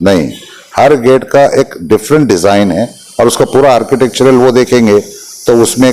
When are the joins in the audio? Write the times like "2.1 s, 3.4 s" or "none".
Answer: none

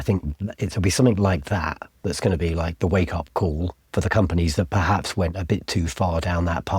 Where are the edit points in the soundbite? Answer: 3.8 s

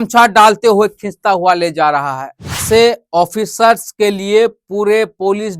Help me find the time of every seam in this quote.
2.6 s

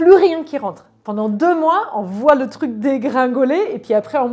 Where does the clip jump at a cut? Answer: none

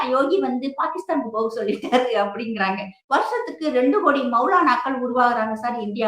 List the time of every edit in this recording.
2.9 s

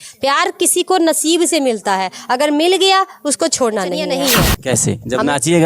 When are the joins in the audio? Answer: 4.1 s

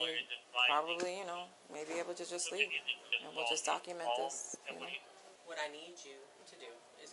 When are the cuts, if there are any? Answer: 5.4 s

